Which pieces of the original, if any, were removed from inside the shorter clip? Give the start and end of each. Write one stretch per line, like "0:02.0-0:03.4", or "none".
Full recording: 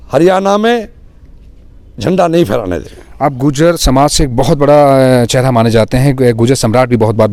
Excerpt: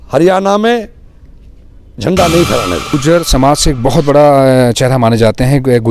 0:02.9-0:03.4